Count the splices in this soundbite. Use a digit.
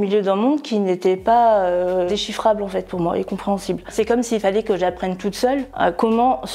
2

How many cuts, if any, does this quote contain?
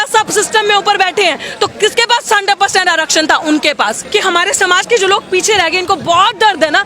1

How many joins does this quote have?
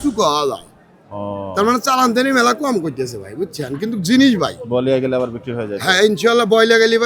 0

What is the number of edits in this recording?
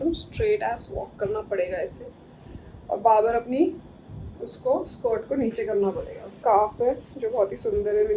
0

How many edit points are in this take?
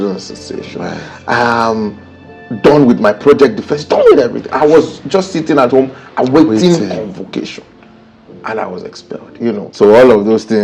1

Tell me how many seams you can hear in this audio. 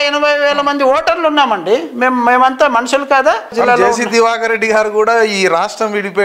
1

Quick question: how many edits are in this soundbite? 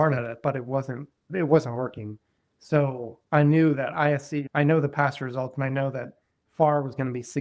2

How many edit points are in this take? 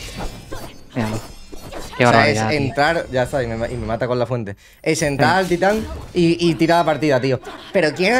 0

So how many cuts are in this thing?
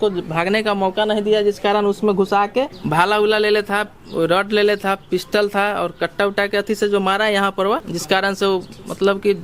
2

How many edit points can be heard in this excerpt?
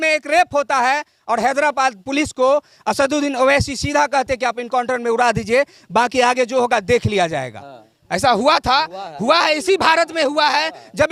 0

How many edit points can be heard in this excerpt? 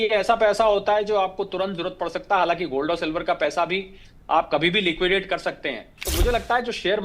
1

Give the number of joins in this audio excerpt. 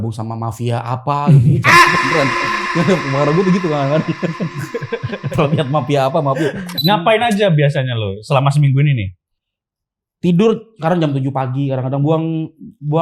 1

